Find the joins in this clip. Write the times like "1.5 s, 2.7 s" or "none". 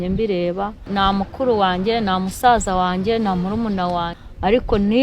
0.9 s, 4.1 s